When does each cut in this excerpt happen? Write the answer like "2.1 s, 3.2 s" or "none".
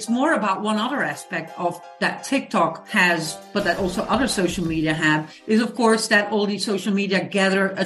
none